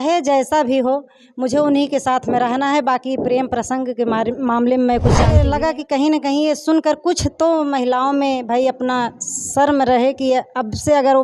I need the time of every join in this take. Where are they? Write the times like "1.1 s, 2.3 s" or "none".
5.3 s